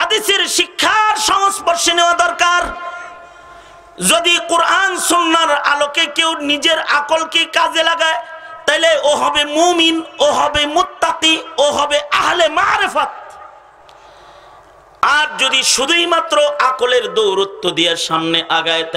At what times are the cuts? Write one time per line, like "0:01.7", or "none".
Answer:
none